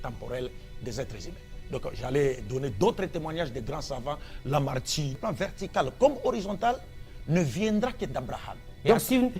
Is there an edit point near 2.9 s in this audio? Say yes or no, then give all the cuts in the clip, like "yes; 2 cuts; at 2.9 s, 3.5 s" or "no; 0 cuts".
no; 1 cut; at 5.2 s